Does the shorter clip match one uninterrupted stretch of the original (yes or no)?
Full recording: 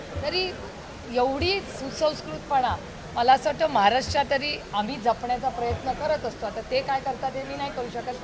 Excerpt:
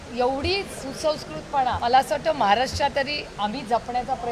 no